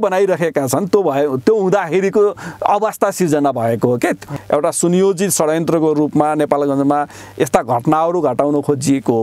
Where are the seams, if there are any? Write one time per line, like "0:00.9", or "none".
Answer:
0:04.3